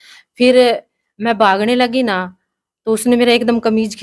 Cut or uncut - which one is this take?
uncut